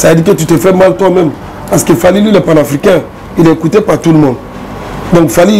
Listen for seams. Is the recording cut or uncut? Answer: uncut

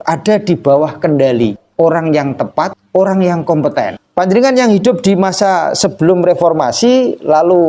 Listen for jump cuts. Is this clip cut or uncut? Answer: cut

